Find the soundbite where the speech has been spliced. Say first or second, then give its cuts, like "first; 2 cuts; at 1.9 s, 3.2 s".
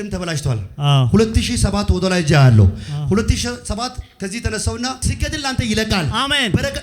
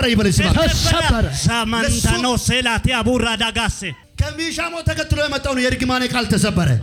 first; 1 cut; at 5.1 s